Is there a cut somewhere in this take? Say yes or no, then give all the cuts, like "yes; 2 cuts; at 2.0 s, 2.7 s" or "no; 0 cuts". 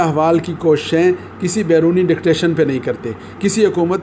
no; 0 cuts